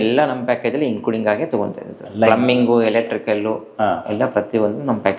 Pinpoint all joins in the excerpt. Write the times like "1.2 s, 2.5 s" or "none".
none